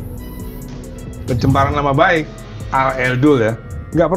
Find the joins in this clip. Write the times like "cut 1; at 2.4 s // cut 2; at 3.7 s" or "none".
none